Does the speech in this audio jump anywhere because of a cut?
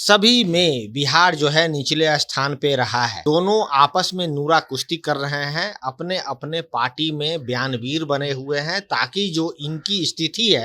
yes; 1 cut; at 3.2 s

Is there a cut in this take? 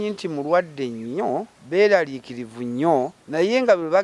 yes; 2 cuts; at 1.6 s, 3.2 s

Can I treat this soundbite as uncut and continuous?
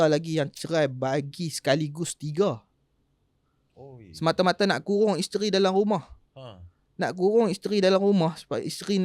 yes; 0 cuts

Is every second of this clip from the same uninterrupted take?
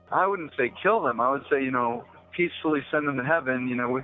yes; 0 cuts

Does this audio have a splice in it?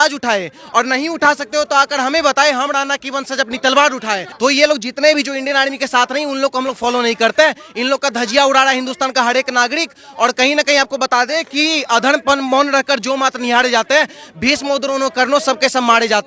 yes; 1 cut; at 4.3 s

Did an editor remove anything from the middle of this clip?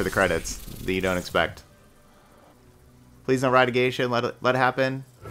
yes; 1 cut; at 2.5 s

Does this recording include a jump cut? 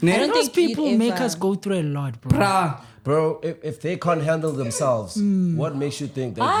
no; 0 cuts

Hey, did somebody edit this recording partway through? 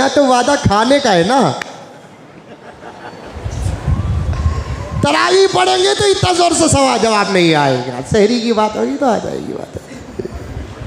no; 0 cuts

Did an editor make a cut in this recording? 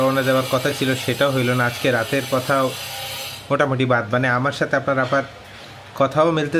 no; 0 cuts

